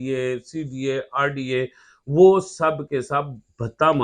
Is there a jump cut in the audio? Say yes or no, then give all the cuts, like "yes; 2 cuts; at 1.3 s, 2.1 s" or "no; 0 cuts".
no; 0 cuts